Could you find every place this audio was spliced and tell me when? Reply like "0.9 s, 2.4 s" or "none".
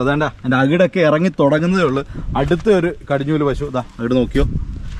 none